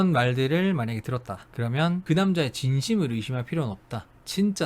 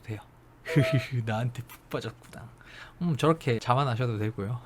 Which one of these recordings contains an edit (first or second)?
second